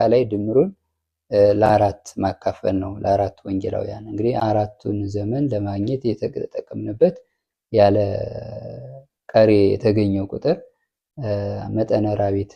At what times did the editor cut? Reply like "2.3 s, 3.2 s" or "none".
4.4 s